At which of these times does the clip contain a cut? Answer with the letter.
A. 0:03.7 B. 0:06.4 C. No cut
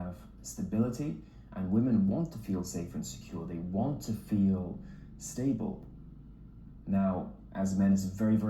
A